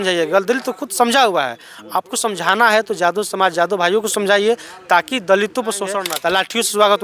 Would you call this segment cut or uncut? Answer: cut